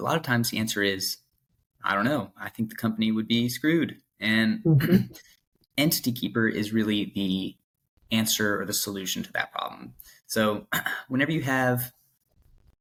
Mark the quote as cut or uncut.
uncut